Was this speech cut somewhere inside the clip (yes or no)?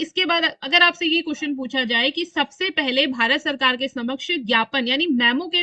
no